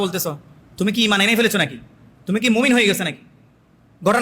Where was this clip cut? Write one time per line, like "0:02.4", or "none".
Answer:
none